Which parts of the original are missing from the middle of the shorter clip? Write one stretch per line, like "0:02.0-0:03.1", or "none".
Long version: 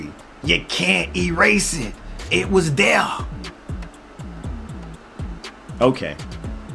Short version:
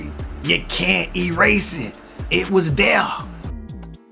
0:03.2-0:04.2